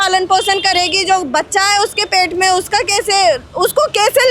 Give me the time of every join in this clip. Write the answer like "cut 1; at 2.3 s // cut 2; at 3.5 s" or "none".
none